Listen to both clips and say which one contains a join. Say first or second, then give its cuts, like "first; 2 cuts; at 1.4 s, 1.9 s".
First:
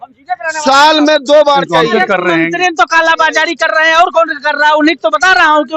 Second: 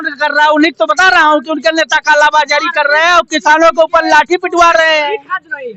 first; 1 cut; at 1.8 s